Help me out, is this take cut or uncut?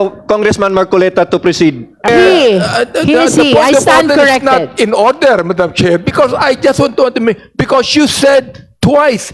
cut